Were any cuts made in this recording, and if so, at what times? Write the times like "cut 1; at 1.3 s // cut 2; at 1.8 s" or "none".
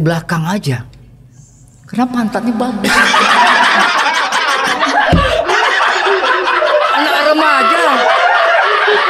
none